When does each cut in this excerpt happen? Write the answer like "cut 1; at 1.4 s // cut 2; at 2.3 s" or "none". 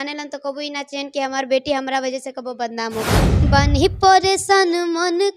cut 1; at 3.4 s